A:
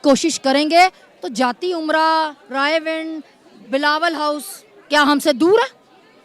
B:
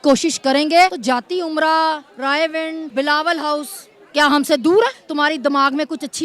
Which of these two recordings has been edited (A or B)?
B